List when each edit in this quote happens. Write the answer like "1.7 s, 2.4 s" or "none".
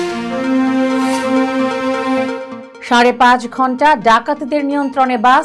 2.5 s